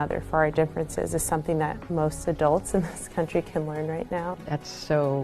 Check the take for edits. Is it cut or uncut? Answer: cut